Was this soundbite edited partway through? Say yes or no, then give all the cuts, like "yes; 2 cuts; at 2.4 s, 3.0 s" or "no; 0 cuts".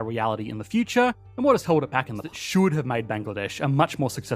yes; 1 cut; at 2.2 s